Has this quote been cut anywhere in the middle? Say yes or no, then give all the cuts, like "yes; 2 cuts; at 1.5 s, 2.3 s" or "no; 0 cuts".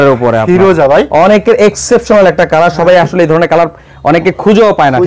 no; 0 cuts